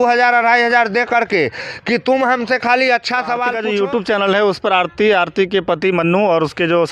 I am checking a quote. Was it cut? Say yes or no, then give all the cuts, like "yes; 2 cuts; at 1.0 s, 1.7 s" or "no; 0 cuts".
yes; 1 cut; at 3.4 s